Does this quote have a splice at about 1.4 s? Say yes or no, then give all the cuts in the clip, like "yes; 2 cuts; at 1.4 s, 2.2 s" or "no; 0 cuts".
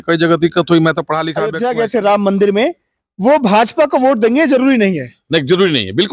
yes; 1 cut; at 1.4 s